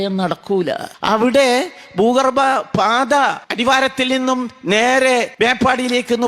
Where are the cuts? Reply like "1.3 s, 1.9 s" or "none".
0.9 s, 3.5 s, 5.3 s